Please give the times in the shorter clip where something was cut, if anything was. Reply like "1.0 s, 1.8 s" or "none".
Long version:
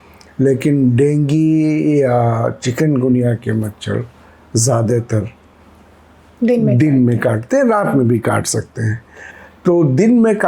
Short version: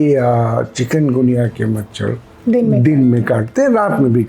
2.3 s